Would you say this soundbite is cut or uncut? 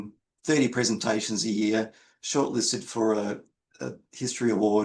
uncut